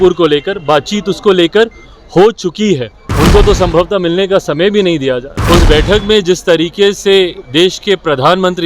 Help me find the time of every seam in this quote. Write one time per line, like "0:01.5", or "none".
0:03.0
0:05.4